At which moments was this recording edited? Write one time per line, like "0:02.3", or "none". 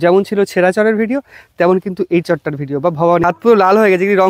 0:03.2